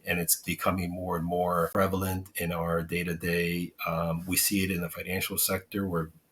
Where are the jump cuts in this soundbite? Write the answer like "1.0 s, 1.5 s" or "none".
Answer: 1.7 s